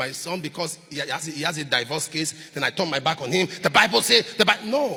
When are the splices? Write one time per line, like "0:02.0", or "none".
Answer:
none